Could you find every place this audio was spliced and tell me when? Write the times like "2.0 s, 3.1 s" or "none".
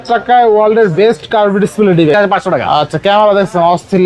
2.1 s